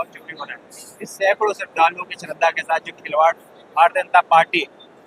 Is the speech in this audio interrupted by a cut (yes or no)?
no